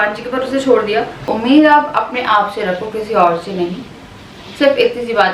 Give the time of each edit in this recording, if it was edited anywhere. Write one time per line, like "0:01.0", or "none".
0:01.2